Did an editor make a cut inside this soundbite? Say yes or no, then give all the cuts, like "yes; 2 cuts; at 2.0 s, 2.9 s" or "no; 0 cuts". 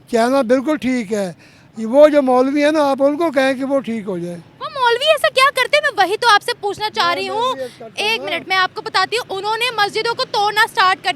no; 0 cuts